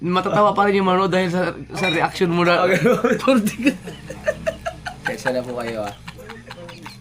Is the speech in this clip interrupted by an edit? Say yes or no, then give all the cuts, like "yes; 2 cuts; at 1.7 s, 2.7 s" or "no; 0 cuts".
no; 0 cuts